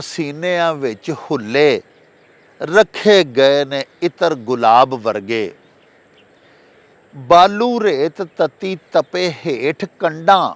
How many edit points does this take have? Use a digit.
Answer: 0